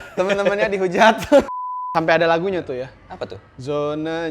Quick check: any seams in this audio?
yes; 1 cut; at 1.5 s

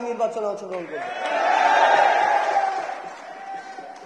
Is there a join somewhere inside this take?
no; 0 cuts

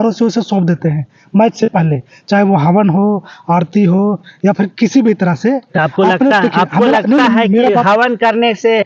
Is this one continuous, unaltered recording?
yes; 0 cuts

